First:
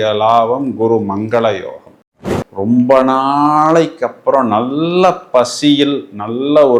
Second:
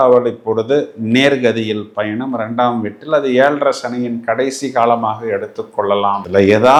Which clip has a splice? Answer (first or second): first